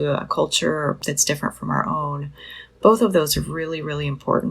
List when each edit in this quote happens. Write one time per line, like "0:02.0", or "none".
0:01.0